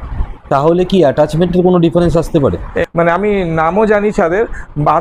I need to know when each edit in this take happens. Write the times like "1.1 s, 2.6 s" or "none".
2.7 s